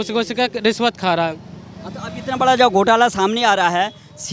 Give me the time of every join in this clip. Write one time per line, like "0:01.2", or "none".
none